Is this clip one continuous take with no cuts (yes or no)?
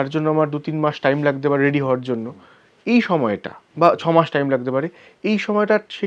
yes